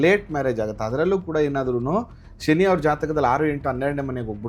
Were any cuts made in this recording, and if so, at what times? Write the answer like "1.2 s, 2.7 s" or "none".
none